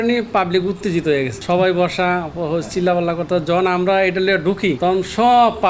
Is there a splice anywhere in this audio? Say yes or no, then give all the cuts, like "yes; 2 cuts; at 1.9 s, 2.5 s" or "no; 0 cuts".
yes; 2 cuts; at 1.4 s, 4.8 s